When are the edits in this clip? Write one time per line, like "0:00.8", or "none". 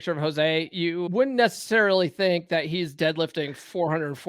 0:01.1